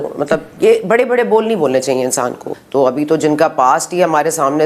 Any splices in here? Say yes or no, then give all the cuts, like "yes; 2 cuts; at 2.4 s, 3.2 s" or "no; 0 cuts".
yes; 1 cut; at 2.4 s